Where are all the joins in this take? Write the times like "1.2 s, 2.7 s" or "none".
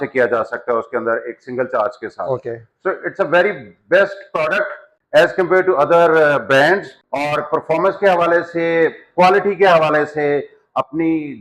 none

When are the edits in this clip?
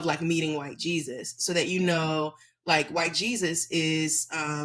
none

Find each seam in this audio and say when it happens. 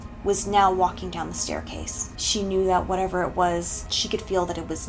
2.1 s

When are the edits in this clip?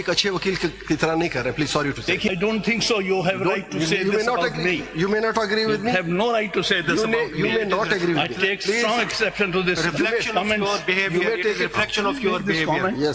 2.3 s

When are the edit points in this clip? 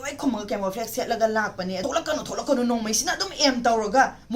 1.8 s

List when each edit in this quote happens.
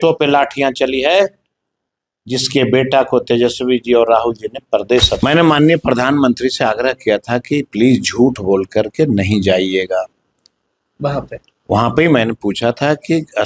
5.2 s

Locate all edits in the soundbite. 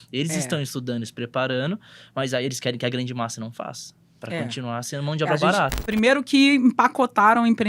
5.8 s

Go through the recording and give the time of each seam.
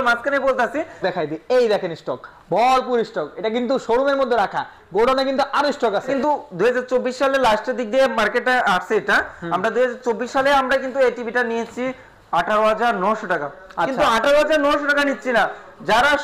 1.0 s, 6.1 s

